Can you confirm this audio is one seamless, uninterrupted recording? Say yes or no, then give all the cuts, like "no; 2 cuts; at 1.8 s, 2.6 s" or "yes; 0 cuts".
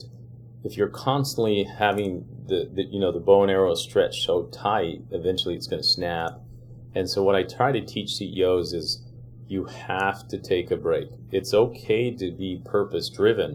yes; 0 cuts